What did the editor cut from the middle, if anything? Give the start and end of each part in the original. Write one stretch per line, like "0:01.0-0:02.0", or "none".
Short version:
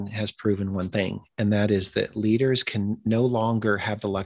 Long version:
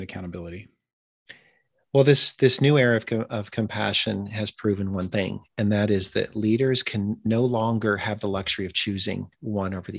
none